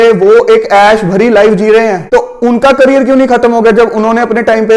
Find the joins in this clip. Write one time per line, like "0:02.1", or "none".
0:02.0